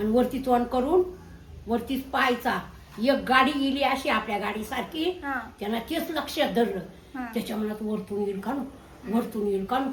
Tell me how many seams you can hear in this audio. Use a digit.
0